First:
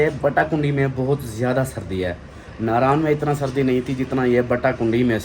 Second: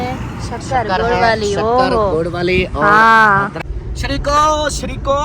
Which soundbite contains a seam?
second; 1 cut; at 3.6 s

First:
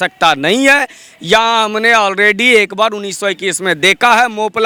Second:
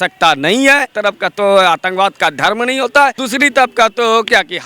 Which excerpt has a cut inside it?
second; 2 cuts; at 0.9 s, 3.2 s

